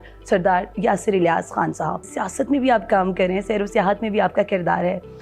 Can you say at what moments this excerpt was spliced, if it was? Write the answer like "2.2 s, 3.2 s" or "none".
2.1 s

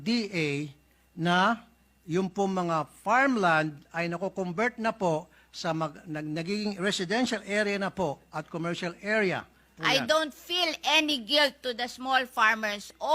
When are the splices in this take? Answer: 10.0 s

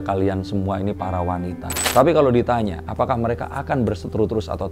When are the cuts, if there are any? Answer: 1.7 s

